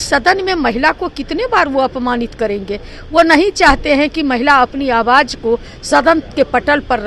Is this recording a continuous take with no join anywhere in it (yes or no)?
yes